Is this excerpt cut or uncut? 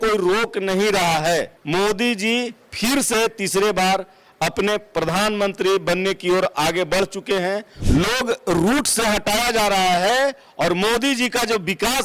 cut